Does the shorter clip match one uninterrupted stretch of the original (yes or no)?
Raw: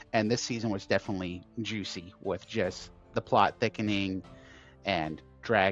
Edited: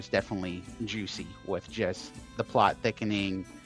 yes